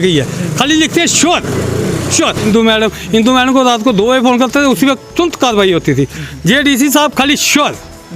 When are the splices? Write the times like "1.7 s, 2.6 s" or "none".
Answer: 2.4 s, 5.0 s